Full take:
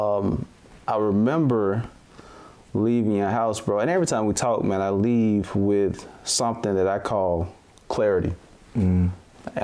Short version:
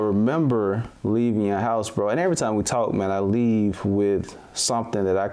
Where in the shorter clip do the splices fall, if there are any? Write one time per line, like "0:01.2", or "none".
0:00.9